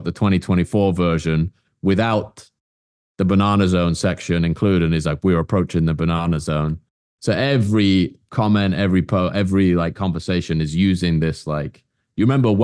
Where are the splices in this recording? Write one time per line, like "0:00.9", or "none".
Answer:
none